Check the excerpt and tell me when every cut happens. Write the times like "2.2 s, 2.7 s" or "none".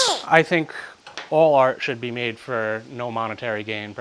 none